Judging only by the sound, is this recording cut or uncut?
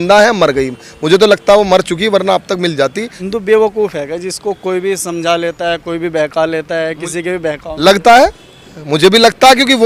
uncut